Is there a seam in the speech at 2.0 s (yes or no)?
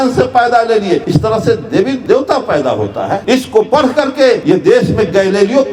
yes